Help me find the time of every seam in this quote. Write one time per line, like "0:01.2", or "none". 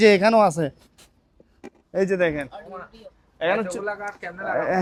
none